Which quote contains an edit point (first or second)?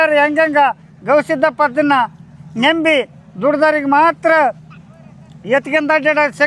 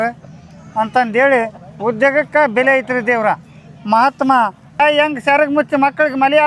second